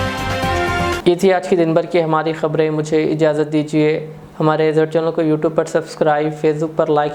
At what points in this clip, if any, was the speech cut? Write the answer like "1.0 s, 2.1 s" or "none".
none